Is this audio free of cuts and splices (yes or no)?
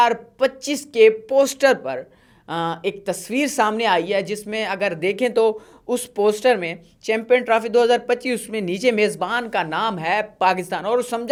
yes